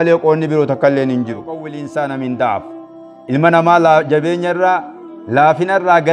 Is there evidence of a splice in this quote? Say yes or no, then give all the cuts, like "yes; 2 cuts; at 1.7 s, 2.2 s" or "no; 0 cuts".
yes; 1 cut; at 1.8 s